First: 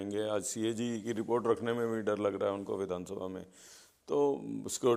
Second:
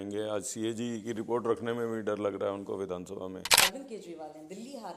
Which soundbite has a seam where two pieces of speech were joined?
second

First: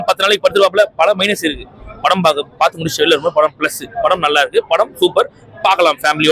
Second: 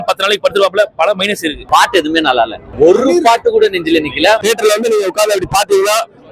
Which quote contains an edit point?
second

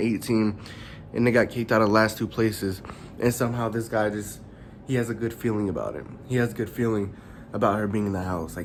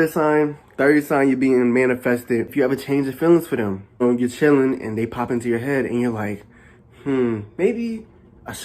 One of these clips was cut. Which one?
second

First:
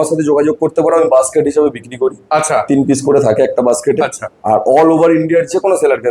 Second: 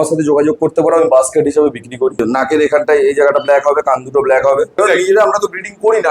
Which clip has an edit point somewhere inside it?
second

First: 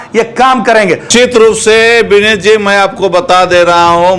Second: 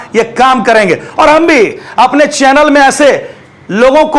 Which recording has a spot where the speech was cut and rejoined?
first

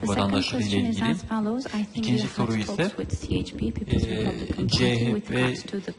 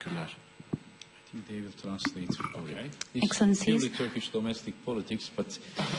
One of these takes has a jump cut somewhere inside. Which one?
second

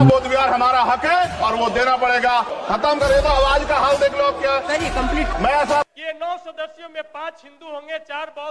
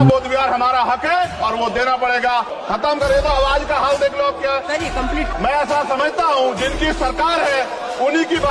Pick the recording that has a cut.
first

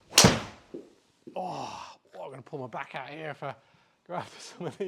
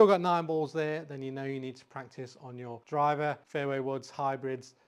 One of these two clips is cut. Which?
second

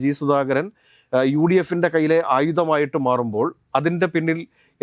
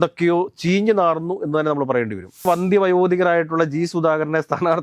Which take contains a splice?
second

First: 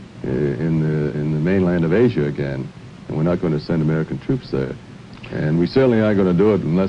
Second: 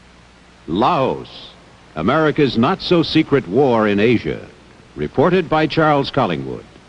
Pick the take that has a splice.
second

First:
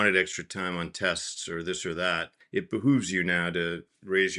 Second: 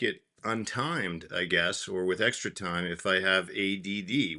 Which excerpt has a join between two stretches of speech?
first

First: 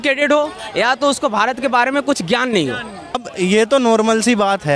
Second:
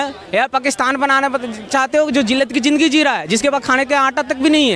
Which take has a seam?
first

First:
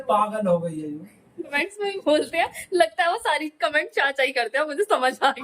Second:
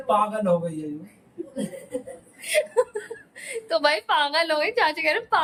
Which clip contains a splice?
first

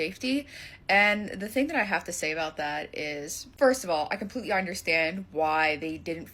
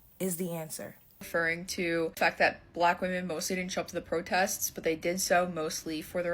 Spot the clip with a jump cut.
second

